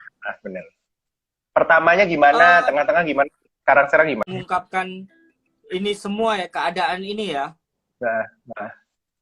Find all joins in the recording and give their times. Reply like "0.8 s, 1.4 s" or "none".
4.2 s